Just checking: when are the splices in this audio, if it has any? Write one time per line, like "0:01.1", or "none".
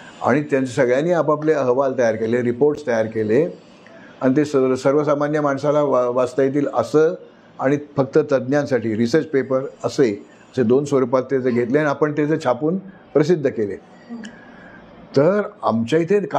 none